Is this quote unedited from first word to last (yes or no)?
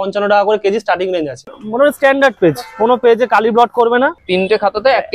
no